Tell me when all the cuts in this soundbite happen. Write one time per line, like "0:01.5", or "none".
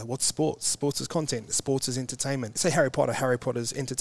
0:02.6